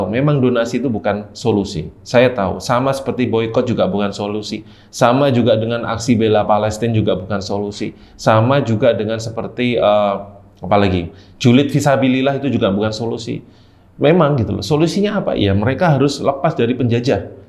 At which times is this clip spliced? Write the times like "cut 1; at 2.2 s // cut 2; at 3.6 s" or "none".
none